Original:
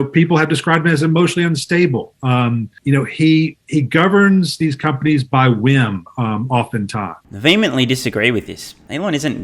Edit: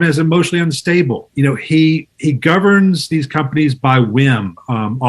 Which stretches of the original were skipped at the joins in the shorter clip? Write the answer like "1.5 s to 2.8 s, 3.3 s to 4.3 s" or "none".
2.1 s to 2.8 s